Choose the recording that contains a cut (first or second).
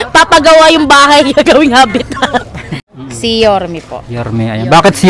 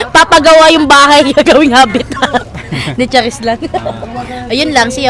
first